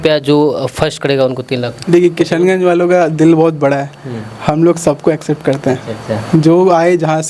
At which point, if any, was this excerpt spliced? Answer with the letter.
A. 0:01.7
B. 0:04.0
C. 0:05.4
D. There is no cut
A